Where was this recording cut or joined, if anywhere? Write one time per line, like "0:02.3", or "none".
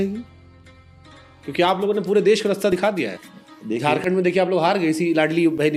none